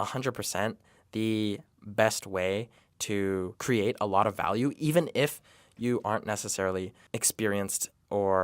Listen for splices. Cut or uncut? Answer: cut